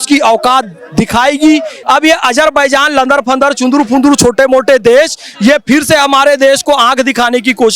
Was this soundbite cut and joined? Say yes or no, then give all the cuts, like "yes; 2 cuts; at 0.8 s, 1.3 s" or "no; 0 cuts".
yes; 1 cut; at 1.7 s